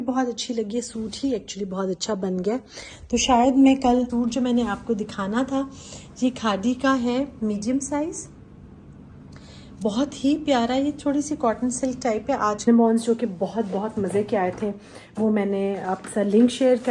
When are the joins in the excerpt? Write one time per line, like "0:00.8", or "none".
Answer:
0:04.1
0:12.7